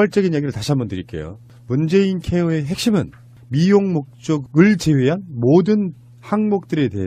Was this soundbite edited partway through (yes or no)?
no